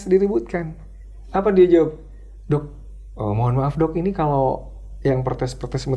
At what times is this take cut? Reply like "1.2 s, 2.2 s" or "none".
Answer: none

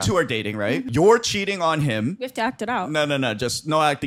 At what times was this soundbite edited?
0.9 s, 2.2 s

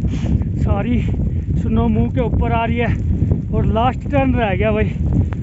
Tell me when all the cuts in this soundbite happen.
none

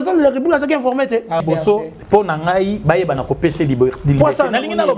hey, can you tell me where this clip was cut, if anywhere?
1.4 s

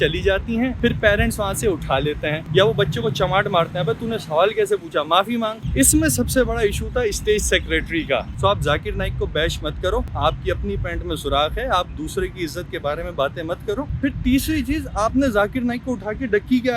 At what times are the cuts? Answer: 5.6 s, 8.4 s, 10.1 s

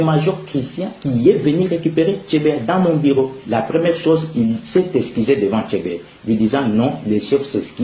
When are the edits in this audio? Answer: 5.9 s

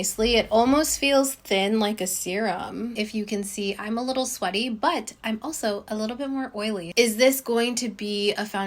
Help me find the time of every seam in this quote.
2.9 s, 6.9 s

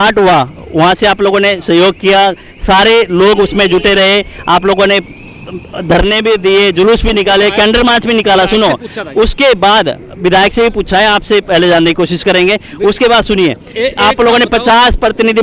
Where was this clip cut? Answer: none

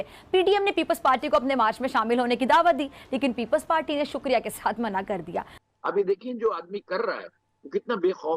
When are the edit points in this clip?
5.5 s

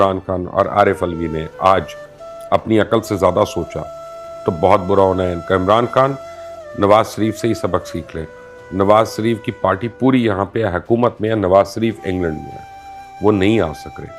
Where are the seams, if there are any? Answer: none

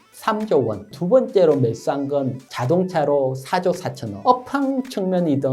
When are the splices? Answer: 0.9 s, 4.1 s

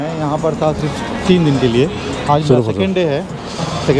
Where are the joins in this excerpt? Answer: none

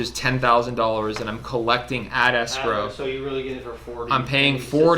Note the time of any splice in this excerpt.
none

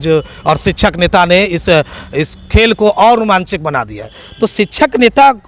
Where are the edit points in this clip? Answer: 4.2 s

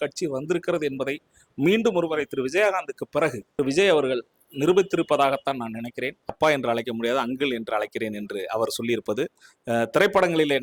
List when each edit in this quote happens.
3.4 s, 6.3 s

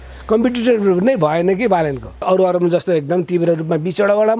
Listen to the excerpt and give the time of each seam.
2.2 s

